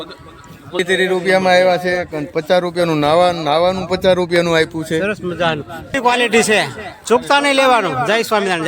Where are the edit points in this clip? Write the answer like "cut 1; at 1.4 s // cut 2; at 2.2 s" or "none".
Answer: cut 1; at 0.8 s // cut 2; at 6.0 s